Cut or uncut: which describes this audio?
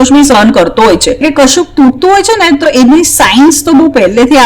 cut